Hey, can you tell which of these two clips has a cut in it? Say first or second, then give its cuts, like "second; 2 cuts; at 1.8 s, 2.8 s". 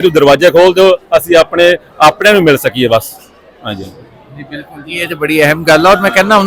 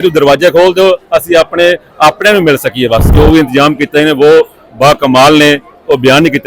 second; 1 cut; at 3.1 s